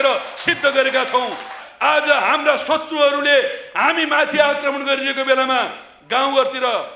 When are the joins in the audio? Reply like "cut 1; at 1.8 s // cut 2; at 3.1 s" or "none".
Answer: cut 1; at 1.6 s